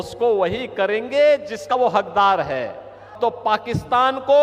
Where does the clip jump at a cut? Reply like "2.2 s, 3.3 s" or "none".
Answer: 3.1 s